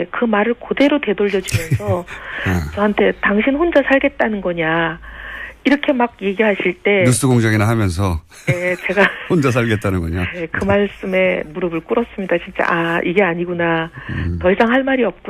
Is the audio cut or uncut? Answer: uncut